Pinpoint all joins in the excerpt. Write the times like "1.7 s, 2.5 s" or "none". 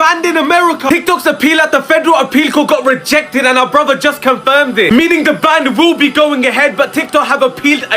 none